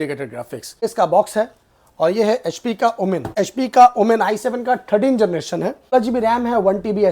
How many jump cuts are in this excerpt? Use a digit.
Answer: 3